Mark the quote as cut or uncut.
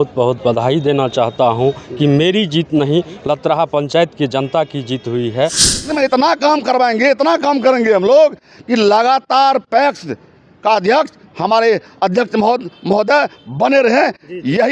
cut